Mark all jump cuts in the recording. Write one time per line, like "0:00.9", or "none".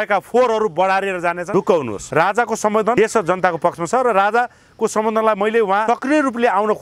0:01.4
0:02.0
0:02.9
0:05.8